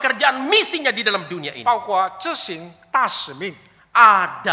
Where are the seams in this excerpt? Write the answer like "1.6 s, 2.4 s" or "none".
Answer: none